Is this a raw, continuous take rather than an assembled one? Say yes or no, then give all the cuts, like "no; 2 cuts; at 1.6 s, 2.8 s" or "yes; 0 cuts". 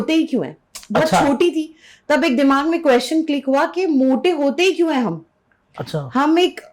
yes; 0 cuts